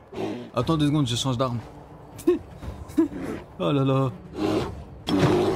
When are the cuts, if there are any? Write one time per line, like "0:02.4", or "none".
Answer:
0:04.3